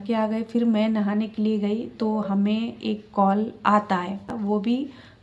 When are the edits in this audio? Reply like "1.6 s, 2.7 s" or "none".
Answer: 4.3 s